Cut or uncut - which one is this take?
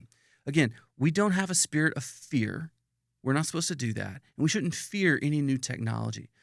uncut